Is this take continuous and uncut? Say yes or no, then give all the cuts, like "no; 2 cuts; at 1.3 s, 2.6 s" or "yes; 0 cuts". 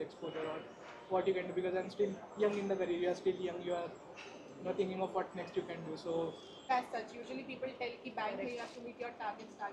no; 1 cut; at 6.7 s